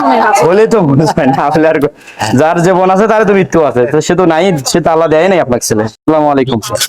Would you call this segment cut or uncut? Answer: cut